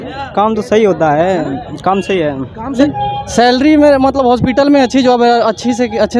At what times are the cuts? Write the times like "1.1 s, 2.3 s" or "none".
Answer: 2.8 s